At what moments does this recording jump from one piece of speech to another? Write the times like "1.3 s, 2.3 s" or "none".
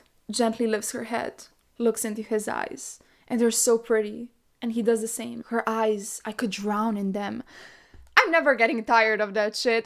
1.7 s, 5.4 s